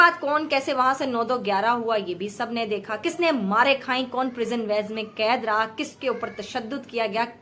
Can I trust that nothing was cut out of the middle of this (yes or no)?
yes